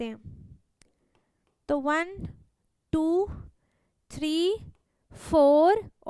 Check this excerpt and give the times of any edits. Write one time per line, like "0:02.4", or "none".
none